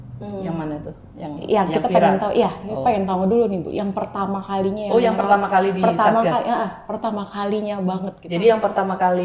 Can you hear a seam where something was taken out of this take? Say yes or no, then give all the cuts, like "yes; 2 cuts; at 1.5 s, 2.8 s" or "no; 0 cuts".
yes; 1 cut; at 8.2 s